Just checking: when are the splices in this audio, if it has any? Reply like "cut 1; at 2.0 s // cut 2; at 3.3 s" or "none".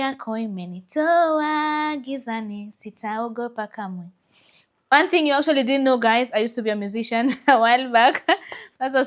none